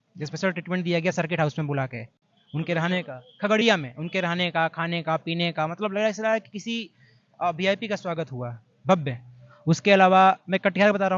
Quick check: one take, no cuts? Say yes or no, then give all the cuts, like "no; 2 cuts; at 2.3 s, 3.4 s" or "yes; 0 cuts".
yes; 0 cuts